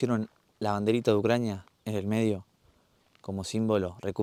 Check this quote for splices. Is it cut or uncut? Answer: uncut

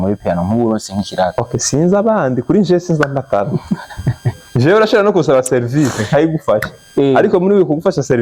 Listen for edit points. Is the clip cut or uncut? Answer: uncut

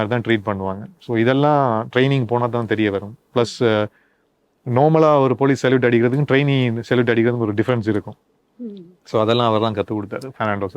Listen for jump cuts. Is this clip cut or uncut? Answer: uncut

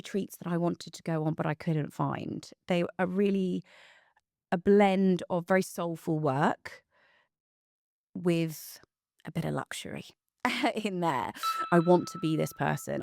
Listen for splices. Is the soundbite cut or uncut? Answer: cut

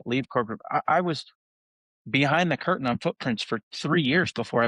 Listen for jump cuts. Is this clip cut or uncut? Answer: cut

